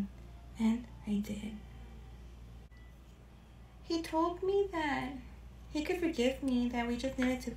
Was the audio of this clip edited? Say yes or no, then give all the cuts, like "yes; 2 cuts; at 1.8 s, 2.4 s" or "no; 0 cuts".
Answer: yes; 1 cut; at 2.7 s